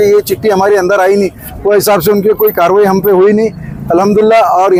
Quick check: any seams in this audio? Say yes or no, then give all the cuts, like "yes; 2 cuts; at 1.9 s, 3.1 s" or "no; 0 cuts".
no; 0 cuts